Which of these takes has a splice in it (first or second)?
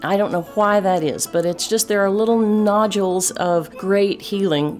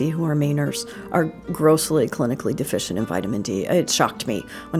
first